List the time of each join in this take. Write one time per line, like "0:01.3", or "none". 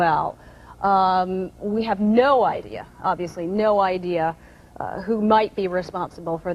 none